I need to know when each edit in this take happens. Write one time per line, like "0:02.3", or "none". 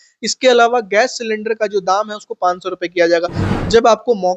0:03.4